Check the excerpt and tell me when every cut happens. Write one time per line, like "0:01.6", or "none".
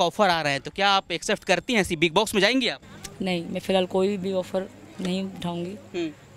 none